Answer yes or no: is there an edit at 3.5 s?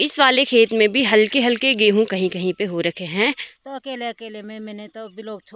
yes